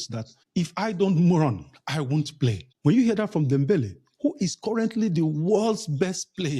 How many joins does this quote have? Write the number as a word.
zero